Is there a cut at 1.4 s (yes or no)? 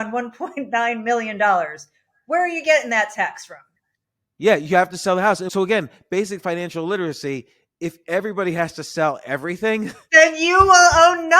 no